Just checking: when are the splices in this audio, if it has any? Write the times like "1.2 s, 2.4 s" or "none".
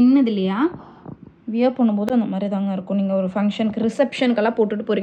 none